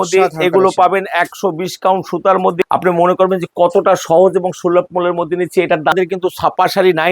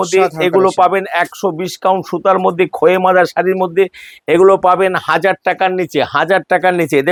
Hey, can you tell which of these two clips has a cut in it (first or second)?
first